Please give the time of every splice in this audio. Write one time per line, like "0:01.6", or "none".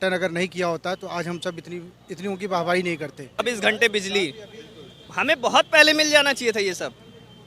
0:03.4